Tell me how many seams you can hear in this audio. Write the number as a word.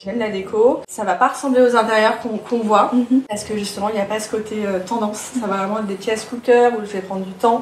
one